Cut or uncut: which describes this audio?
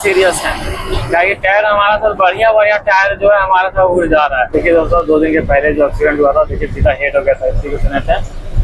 cut